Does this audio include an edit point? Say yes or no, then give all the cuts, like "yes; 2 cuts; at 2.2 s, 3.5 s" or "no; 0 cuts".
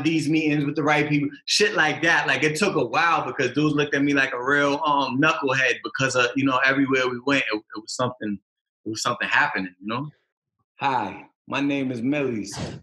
yes; 1 cut; at 10.3 s